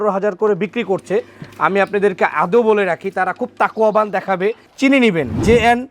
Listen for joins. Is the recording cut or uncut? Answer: cut